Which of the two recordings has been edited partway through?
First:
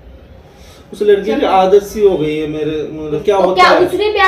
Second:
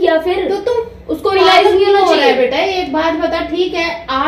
first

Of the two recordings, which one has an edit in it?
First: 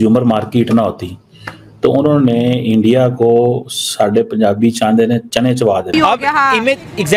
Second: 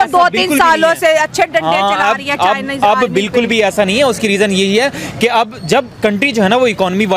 first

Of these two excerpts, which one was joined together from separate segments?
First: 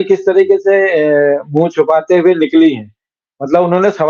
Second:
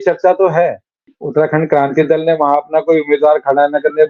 second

